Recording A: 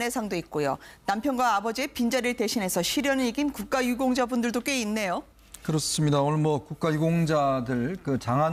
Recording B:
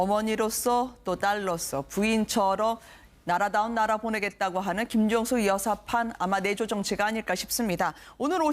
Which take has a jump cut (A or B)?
B